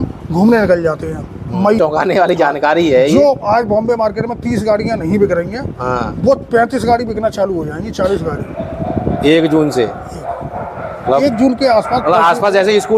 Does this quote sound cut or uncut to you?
cut